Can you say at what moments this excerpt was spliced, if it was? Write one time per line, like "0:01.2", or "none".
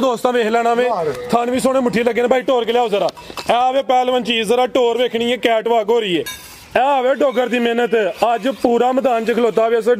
0:06.4